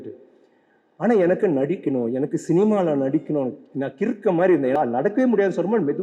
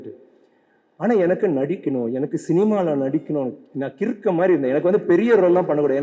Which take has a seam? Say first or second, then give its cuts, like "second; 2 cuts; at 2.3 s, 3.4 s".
first; 1 cut; at 4.8 s